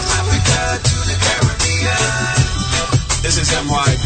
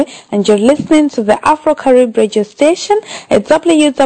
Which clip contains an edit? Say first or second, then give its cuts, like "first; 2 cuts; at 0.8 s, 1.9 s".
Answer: second; 1 cut; at 1.1 s